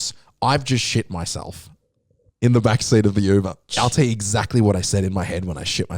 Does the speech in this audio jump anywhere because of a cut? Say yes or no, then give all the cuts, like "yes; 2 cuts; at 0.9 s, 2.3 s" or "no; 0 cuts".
yes; 1 cut; at 3.7 s